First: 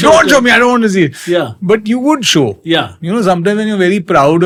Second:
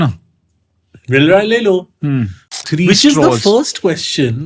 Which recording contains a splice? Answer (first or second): second